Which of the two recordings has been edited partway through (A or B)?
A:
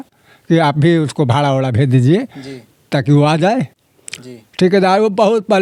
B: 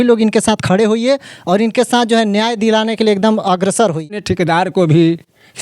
B